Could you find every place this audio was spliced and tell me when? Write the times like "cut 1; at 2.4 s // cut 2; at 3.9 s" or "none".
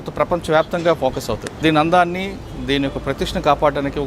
cut 1; at 1.6 s